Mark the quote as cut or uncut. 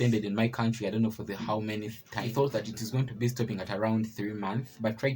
cut